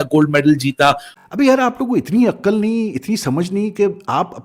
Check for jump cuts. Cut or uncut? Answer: cut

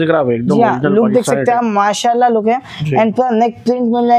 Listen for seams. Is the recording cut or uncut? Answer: uncut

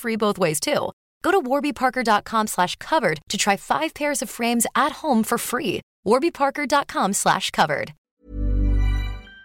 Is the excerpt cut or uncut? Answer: cut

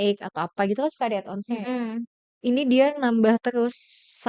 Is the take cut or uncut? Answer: cut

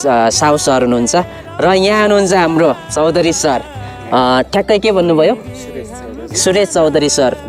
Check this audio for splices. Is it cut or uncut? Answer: uncut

